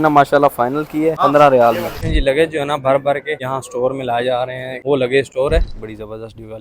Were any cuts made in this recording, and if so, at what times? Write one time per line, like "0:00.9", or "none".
0:01.2
0:02.0
0:03.4
0:04.7
0:05.7